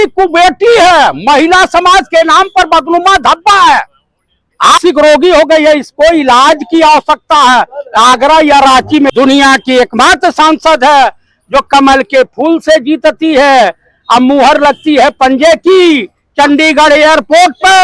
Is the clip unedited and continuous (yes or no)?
no